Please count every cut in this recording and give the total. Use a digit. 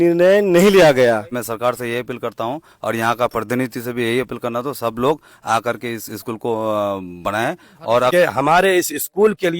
2